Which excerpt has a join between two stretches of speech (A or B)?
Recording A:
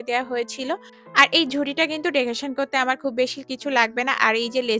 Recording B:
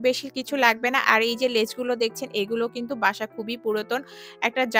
A